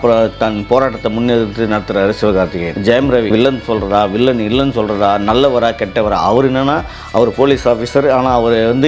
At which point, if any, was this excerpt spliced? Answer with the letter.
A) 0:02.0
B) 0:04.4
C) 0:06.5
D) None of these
D